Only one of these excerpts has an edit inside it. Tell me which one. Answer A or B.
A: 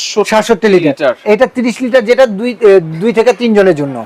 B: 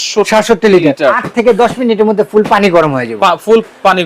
B